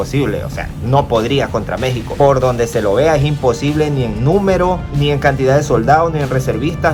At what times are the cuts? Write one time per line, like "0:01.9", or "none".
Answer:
none

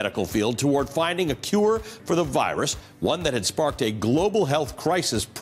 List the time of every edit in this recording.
none

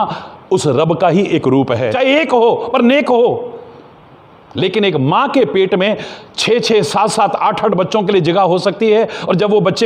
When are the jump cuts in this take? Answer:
0:01.9

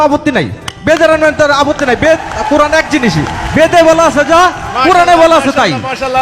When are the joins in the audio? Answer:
none

